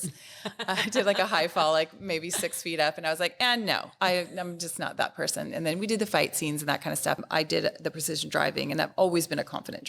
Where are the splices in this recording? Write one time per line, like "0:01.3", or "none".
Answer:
0:07.2